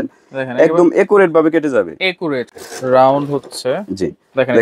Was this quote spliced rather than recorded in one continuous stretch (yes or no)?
yes